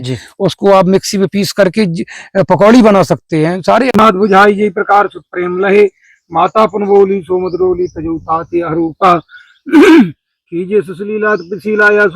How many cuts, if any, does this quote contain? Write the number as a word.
one